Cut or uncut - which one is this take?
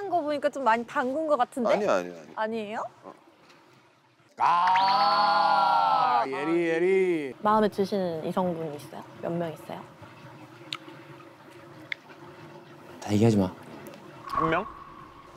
cut